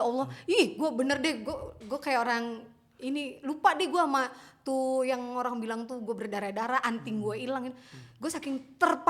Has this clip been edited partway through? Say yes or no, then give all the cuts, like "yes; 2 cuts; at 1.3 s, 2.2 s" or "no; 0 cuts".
no; 0 cuts